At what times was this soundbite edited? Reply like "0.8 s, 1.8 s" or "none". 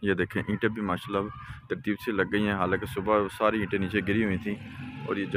none